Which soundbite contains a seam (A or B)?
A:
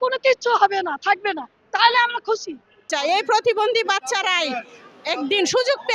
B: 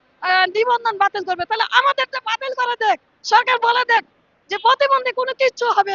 A